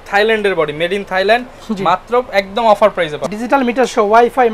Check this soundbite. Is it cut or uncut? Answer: cut